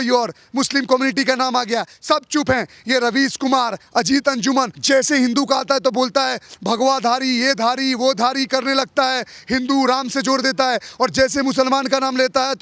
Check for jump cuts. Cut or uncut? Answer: uncut